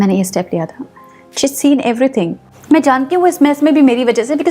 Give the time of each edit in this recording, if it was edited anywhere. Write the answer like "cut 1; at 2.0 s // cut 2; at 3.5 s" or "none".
cut 1; at 2.5 s